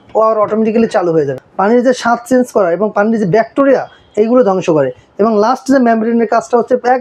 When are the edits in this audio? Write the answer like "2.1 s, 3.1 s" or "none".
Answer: 1.4 s